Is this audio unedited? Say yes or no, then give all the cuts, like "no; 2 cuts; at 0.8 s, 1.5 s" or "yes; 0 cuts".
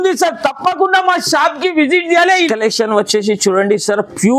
no; 1 cut; at 2.5 s